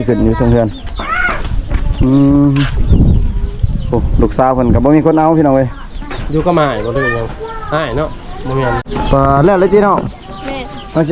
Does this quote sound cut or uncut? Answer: cut